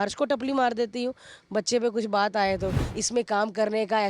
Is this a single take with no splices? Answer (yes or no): no